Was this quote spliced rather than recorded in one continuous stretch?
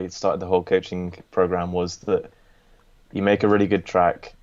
no; 0 cuts

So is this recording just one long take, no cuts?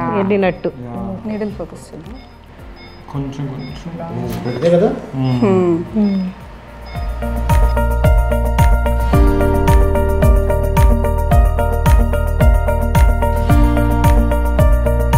yes; 0 cuts

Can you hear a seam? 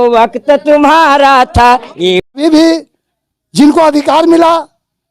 yes; 1 cut; at 2.2 s

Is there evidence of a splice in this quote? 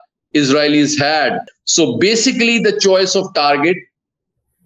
yes; 1 cut; at 1.5 s

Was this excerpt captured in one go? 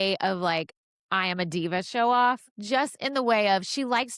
no; 1 cut; at 2.5 s

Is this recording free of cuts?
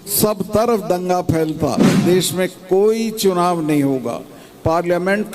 no; 1 cut; at 2.0 s

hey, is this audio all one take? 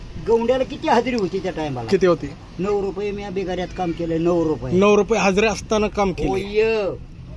yes; 0 cuts

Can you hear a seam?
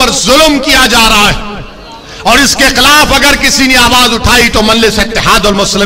no; 0 cuts

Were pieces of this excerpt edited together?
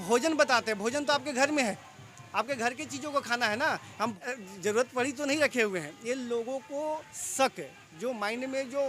yes; 1 cut; at 3.9 s

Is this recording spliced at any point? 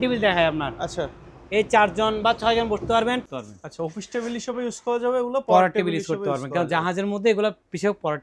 yes; 1 cut; at 3.2 s

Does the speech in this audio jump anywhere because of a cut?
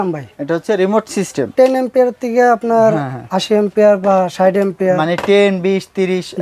yes; 1 cut; at 1.5 s

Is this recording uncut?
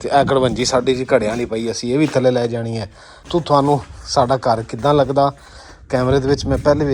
no; 1 cut; at 3.2 s

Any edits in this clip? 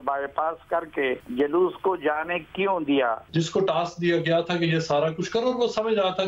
yes; 2 cuts; at 1.2 s, 3.2 s

